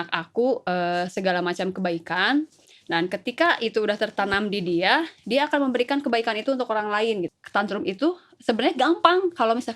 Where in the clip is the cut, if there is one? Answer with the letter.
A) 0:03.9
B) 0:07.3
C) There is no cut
B